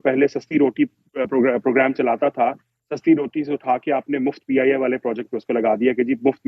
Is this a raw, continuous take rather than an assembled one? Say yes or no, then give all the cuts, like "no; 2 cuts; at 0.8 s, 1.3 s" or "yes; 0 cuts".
yes; 0 cuts